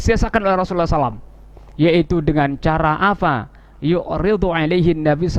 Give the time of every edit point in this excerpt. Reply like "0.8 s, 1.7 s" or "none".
none